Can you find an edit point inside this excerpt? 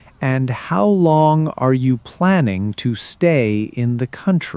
no; 0 cuts

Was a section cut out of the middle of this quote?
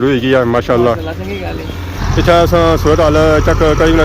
yes; 1 cut; at 2.0 s

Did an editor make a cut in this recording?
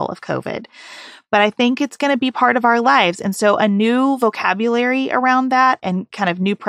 no; 0 cuts

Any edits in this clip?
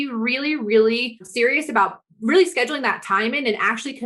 yes; 1 cut; at 1.3 s

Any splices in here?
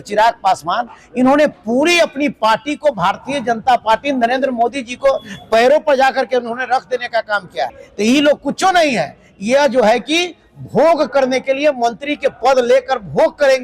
yes; 1 cut; at 7.7 s

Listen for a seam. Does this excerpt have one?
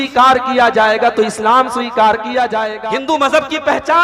yes; 1 cut; at 2.8 s

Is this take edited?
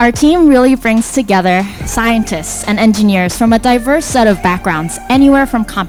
no; 0 cuts

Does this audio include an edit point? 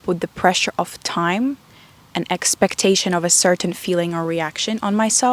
no; 0 cuts

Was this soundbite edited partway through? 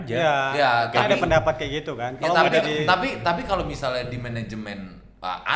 no; 0 cuts

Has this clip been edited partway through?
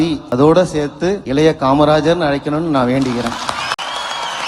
no; 0 cuts

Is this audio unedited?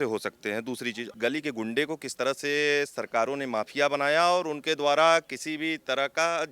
no; 1 cut; at 1.1 s

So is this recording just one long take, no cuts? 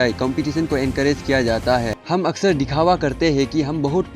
no; 1 cut; at 2.0 s

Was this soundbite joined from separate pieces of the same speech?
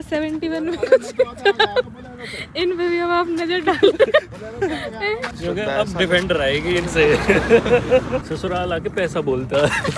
yes; 2 cuts; at 5.3 s, 8.2 s

